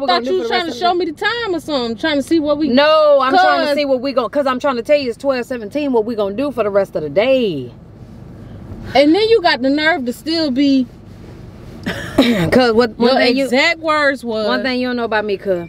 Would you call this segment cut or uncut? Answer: cut